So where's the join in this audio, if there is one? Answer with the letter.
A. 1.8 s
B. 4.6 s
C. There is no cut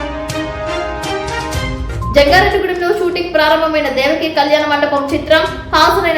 A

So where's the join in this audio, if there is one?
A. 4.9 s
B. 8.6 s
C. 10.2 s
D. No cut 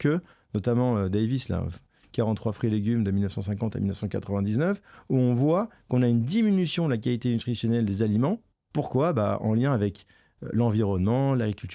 B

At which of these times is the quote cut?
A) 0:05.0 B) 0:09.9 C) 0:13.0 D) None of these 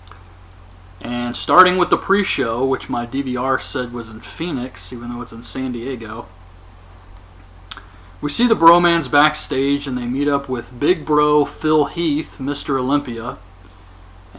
B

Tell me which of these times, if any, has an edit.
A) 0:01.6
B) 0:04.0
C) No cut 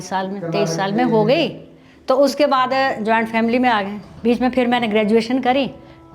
B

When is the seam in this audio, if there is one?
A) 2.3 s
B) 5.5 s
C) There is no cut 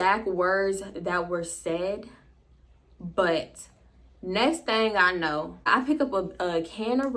B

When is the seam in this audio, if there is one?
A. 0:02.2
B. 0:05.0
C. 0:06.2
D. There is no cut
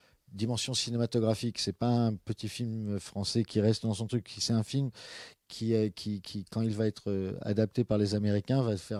D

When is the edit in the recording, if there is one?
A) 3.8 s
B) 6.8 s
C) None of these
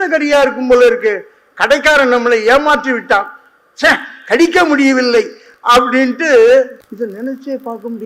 B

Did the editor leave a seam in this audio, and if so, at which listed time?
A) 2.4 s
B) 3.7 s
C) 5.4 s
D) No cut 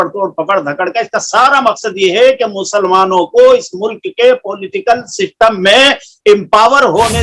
D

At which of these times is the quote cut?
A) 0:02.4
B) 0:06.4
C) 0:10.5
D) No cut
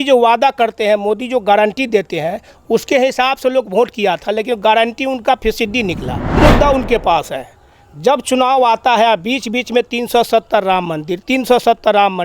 B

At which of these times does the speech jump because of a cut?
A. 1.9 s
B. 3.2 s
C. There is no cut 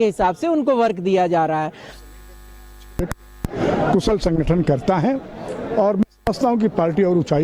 A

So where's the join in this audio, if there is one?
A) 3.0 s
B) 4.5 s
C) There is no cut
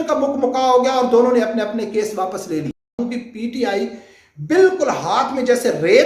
A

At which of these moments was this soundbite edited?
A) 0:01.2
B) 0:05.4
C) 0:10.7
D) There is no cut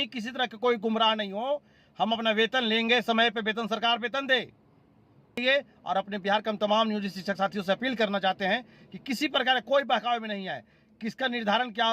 B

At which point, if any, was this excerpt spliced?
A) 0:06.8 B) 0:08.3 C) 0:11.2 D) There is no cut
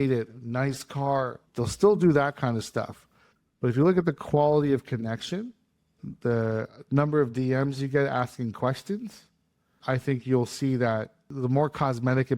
C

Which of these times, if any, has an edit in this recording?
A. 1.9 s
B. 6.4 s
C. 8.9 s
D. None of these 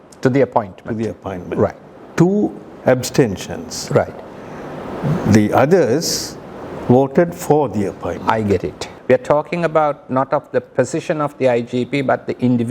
C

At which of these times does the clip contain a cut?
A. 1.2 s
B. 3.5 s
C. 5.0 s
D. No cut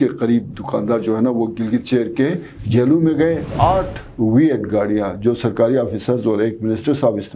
B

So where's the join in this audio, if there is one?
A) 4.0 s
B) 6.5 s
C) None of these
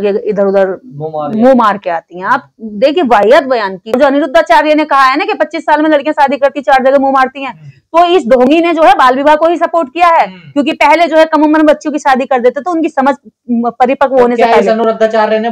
A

